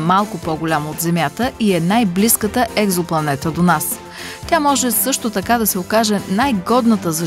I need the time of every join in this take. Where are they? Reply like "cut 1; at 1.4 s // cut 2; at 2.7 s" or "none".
none